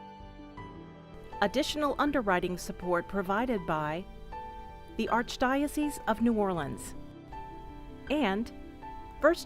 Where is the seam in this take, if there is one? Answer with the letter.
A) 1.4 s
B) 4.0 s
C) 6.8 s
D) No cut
A